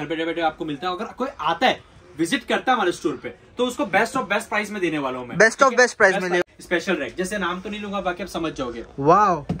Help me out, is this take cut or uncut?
cut